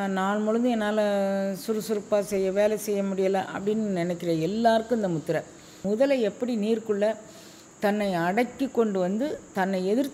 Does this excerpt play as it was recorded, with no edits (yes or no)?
no